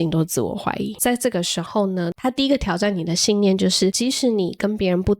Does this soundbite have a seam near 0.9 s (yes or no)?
yes